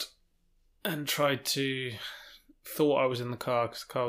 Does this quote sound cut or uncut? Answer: uncut